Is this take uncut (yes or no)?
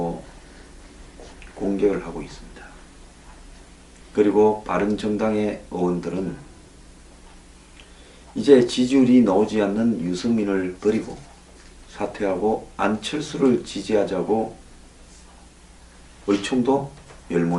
no